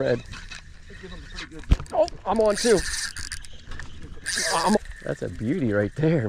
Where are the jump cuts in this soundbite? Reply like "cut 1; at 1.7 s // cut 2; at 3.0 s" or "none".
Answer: cut 1; at 4.8 s